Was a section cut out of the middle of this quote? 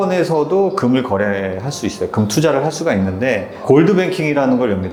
no; 0 cuts

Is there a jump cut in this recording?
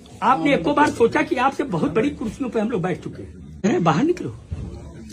yes; 1 cut; at 3.6 s

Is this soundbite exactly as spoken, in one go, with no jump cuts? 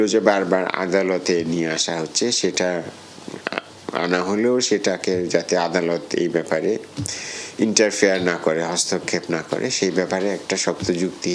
yes; 0 cuts

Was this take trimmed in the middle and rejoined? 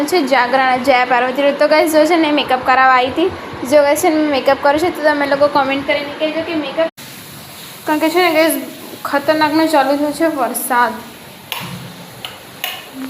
yes; 1 cut; at 6.9 s

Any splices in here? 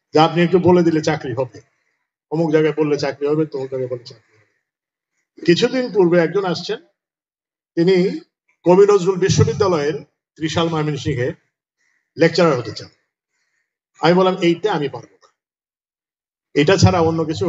no; 0 cuts

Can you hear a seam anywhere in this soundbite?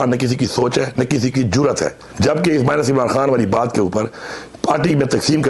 yes; 1 cut; at 2.0 s

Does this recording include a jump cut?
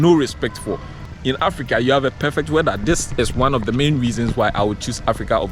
yes; 1 cut; at 1.1 s

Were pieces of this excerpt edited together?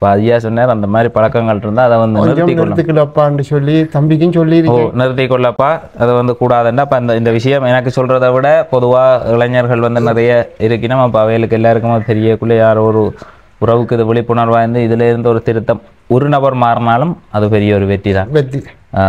no; 0 cuts

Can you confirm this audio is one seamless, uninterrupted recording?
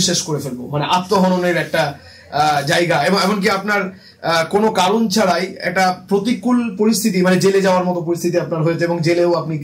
yes; 0 cuts

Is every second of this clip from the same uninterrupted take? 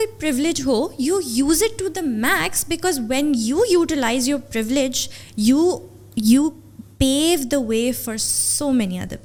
yes; 0 cuts

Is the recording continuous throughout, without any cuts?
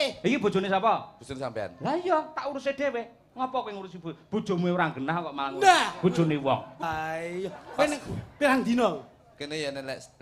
no; 1 cut; at 6.8 s

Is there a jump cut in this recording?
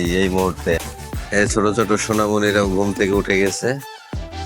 yes; 1 cut; at 1.0 s

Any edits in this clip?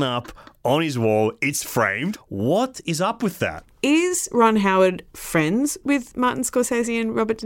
yes; 2 cuts; at 2.1 s, 3.7 s

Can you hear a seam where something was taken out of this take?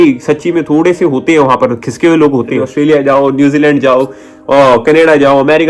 yes; 1 cut; at 2.7 s

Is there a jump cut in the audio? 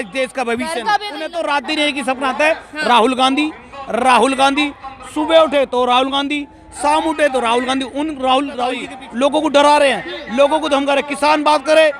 yes; 2 cuts; at 1.3 s, 9.0 s

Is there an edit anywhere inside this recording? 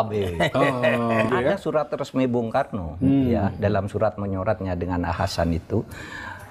yes; 1 cut; at 1.3 s

